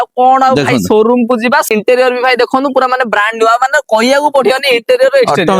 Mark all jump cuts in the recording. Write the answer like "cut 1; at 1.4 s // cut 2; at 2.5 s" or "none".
cut 1; at 1.7 s